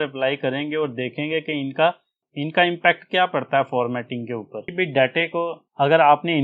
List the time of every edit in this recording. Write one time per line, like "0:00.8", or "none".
0:04.7